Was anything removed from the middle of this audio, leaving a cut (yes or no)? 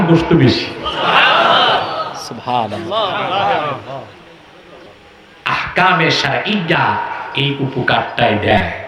no